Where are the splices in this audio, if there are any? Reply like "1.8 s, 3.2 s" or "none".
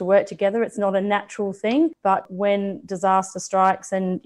2.2 s